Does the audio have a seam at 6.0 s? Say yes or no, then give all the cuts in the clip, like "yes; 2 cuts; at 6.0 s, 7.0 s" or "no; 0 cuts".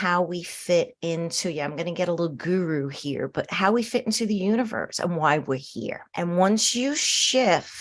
yes; 1 cut; at 6.0 s